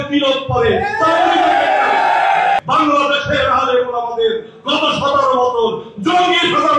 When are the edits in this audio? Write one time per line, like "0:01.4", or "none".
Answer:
0:02.6